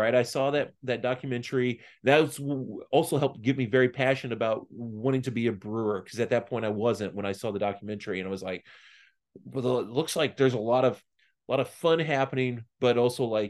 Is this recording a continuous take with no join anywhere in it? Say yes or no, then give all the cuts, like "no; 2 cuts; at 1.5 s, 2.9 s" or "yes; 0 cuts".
yes; 0 cuts